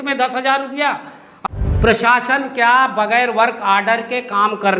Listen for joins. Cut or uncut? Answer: cut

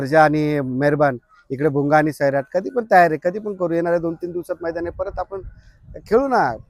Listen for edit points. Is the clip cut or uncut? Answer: uncut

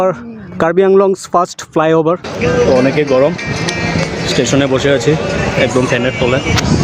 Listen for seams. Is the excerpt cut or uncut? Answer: cut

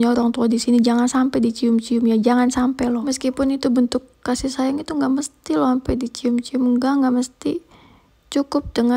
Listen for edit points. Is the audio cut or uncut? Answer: uncut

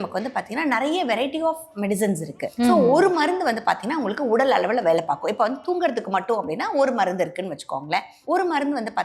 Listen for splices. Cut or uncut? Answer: cut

